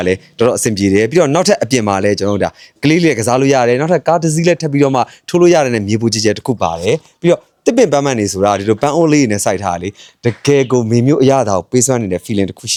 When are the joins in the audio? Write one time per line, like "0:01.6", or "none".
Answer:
none